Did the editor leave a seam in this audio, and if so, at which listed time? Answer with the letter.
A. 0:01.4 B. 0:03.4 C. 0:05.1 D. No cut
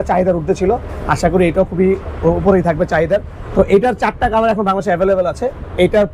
B